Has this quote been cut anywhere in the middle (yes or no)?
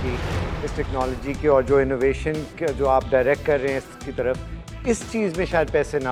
no